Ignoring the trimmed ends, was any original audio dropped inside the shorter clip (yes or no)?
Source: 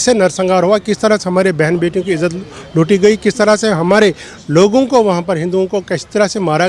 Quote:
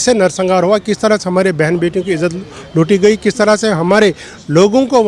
no